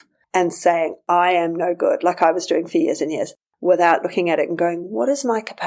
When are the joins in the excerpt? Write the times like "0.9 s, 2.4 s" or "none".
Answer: 3.4 s